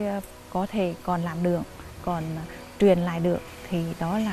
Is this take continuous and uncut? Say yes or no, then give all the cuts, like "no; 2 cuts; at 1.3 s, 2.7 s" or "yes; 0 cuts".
yes; 0 cuts